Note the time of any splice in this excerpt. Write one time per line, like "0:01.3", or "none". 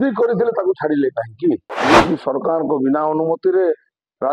0:01.7